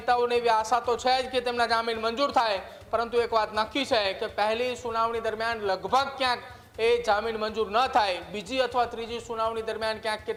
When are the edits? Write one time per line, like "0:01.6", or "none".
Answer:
none